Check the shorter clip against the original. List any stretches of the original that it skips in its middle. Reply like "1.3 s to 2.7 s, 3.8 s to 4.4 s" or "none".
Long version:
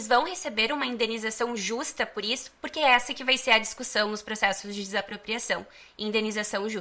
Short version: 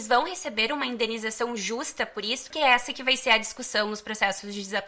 2.5 s to 2.7 s